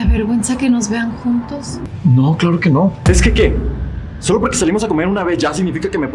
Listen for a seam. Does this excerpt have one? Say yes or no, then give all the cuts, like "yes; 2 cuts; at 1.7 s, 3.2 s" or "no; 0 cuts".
yes; 1 cut; at 3.0 s